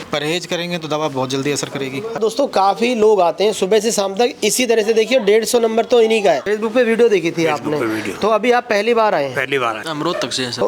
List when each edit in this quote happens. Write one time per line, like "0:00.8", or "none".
0:02.1
0:06.4
0:09.8